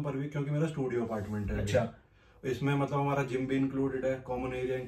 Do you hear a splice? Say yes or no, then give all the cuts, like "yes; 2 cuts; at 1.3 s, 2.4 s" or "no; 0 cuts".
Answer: no; 0 cuts